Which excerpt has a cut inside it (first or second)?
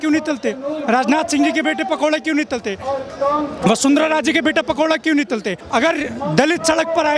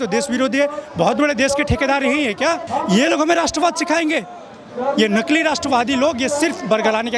first